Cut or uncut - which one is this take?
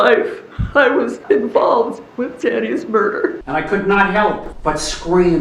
cut